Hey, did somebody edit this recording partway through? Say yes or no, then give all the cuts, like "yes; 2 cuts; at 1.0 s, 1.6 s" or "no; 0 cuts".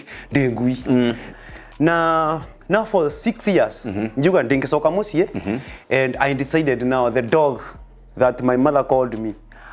yes; 1 cut; at 1.2 s